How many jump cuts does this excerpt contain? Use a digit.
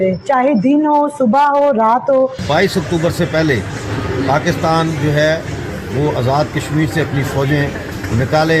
1